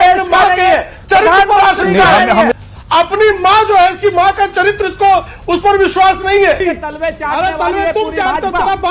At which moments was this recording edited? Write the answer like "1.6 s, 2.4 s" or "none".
2.5 s, 6.6 s

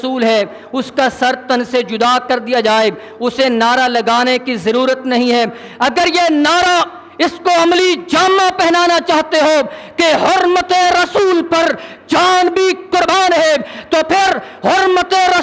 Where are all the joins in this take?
none

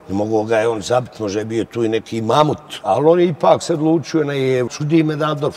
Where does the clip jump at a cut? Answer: 4.7 s

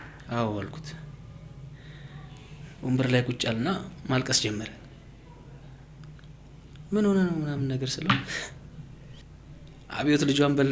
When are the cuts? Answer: 9.2 s

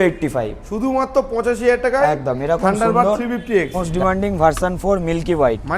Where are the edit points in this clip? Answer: 3.8 s

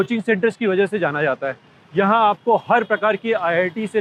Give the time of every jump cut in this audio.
none

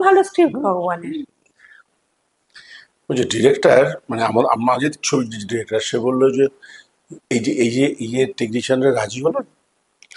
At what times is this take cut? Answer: 1.8 s

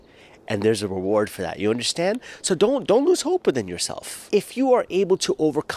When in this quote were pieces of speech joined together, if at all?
4.3 s

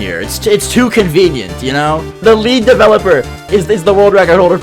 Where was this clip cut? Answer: 2.2 s

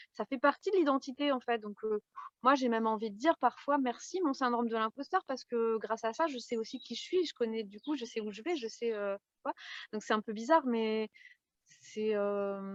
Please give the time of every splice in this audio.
none

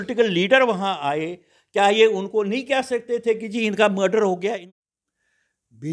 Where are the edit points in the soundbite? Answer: 4.5 s

